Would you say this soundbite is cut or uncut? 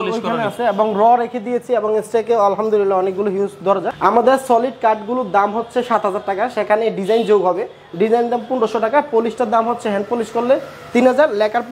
cut